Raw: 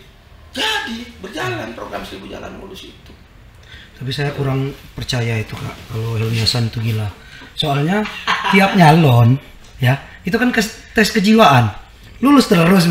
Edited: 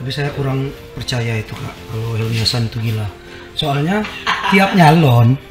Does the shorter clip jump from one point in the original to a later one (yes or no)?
no